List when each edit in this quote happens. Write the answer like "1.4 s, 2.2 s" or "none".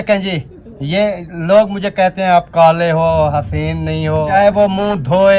4.3 s

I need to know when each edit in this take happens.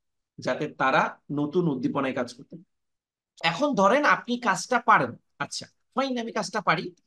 3.4 s

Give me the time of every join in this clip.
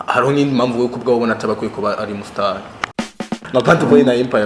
3.1 s

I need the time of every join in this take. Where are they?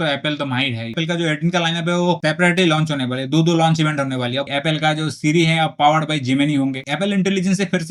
0.9 s, 4.5 s, 6.8 s

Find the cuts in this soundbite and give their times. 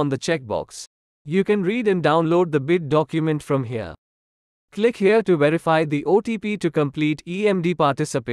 6.7 s

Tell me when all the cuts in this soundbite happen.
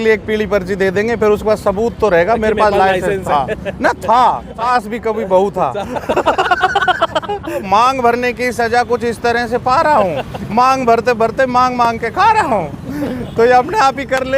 4.7 s, 7.6 s

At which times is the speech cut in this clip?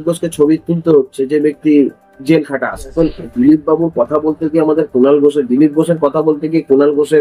2.9 s

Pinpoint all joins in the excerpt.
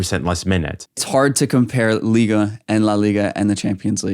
1.0 s

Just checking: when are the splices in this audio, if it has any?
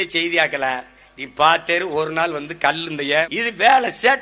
3.3 s

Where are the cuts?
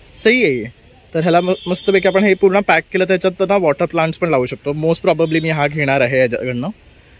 none

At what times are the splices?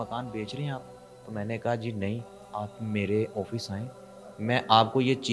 2.4 s

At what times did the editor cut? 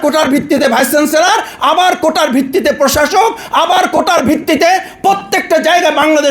none

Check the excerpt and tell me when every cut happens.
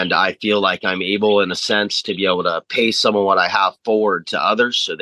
none

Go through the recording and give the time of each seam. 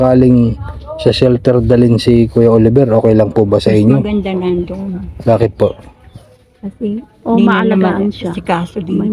none

